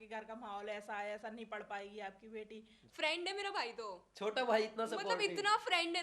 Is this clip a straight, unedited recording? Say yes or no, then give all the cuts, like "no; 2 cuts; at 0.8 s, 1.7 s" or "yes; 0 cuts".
no; 1 cut; at 2.8 s